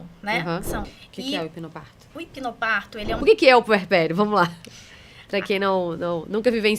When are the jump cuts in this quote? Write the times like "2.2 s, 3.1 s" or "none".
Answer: 1.0 s, 3.1 s